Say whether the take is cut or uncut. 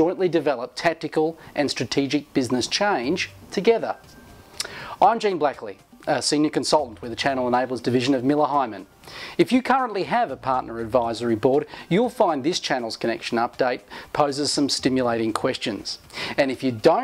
uncut